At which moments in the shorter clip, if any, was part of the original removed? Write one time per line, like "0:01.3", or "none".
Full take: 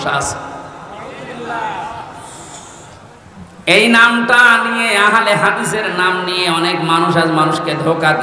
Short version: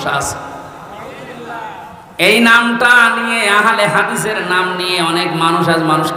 0:02.0